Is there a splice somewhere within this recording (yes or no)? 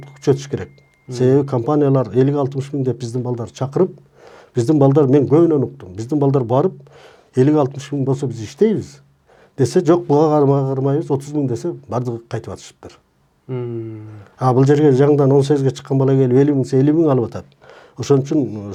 no